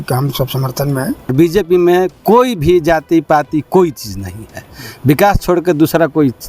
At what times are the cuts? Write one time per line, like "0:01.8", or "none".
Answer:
0:01.3

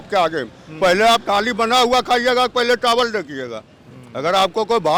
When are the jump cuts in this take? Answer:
none

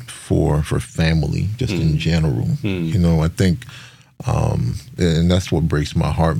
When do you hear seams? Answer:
none

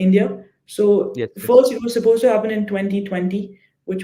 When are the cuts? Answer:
none

